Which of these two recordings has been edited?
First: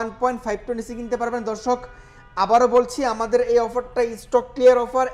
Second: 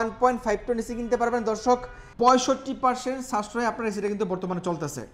second; 1 cut; at 2.0 s

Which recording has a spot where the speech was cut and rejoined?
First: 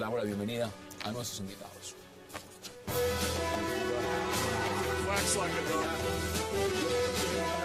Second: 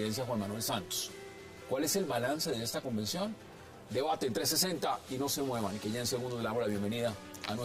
second; 1 cut; at 4.4 s

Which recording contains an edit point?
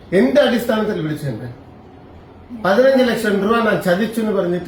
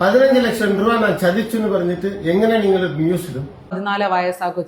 second; 1 cut; at 3.7 s

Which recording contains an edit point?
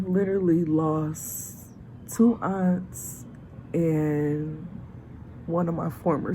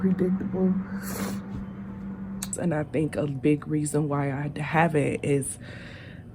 second; 1 cut; at 2.5 s

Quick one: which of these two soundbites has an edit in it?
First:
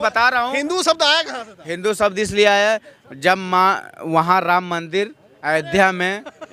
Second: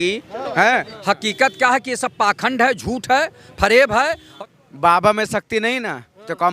second; 2 cuts; at 0.9 s, 4.2 s

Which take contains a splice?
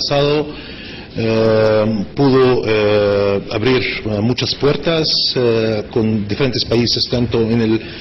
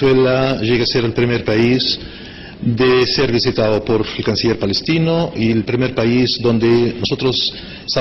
first; 1 cut; at 5.8 s

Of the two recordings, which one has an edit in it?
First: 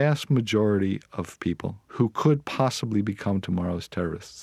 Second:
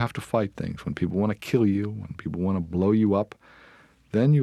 first; 1 cut; at 1.8 s

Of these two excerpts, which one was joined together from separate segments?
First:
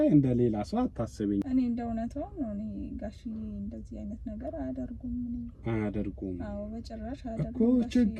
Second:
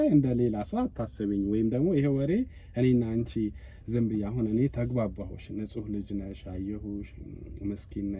first; 1 cut; at 1.4 s

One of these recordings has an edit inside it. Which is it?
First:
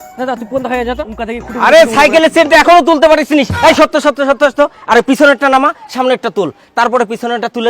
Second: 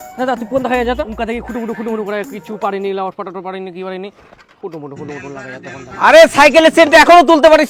first; 1 cut; at 1.5 s

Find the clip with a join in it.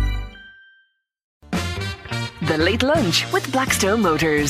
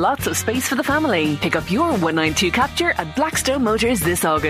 first; 1 cut; at 1.3 s

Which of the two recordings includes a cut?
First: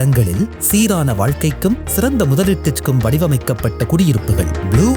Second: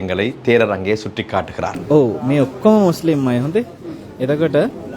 second; 1 cut; at 1.7 s

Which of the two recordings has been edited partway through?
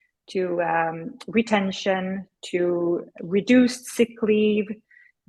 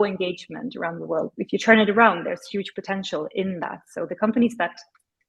second; 1 cut; at 1.3 s

